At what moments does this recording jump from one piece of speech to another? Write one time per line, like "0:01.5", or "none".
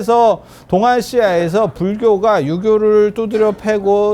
none

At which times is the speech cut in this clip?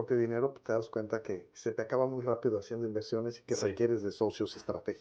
none

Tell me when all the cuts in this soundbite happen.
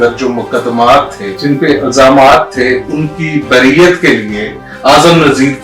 0:01.3

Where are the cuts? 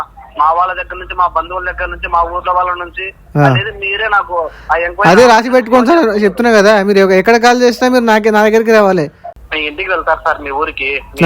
0:09.3

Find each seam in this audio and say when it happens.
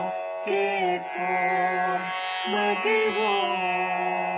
0:01.9

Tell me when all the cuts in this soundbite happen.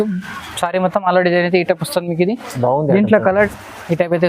0:03.2

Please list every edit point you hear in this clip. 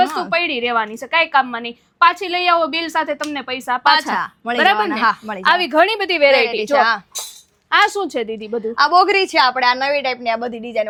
none

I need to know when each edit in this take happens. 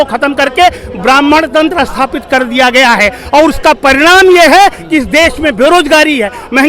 none

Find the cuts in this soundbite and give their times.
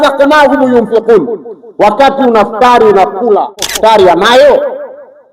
0:03.7

